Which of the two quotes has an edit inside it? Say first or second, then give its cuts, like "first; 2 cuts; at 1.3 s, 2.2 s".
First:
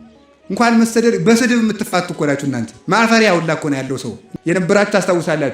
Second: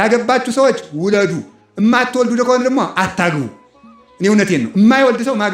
first; 1 cut; at 4.2 s